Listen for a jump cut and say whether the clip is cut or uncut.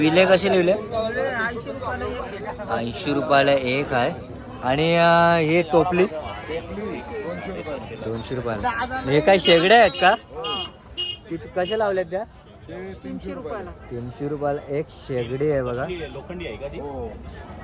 uncut